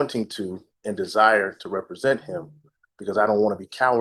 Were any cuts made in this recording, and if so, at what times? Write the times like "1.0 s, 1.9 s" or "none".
none